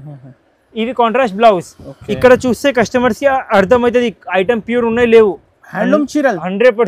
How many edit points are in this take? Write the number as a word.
zero